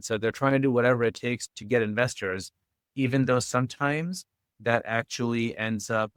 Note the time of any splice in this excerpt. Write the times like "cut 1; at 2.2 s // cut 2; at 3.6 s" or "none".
none